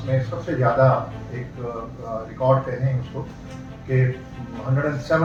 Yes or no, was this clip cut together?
no